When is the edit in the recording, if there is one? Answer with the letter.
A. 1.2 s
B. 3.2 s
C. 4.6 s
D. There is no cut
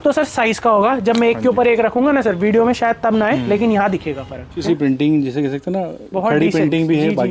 C